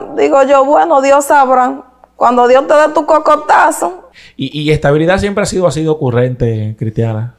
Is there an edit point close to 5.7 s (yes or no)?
no